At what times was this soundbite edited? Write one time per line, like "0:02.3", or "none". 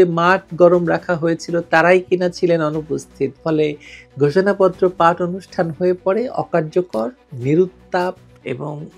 none

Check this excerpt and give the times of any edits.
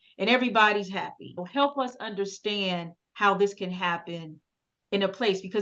0:01.4

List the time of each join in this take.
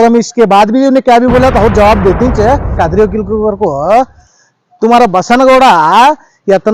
0:02.8

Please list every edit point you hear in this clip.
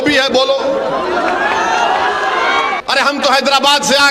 0:02.8

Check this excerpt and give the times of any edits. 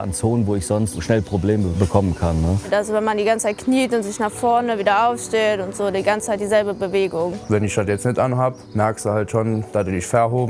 0:02.7
0:07.4

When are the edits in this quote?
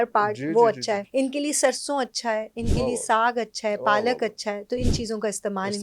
0:01.0

